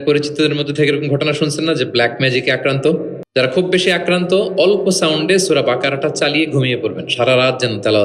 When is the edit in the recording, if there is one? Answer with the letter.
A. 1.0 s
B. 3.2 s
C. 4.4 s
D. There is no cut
B